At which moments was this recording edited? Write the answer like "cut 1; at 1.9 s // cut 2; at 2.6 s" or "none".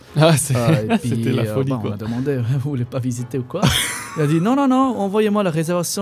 none

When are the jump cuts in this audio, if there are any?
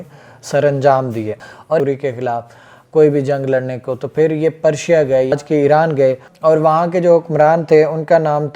cut 1; at 1.8 s // cut 2; at 5.3 s

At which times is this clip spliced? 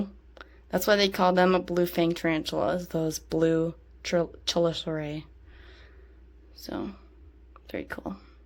none

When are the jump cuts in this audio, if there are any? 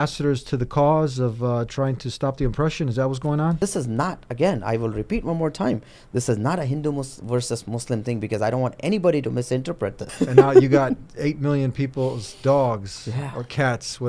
cut 1; at 3.6 s // cut 2; at 10.0 s

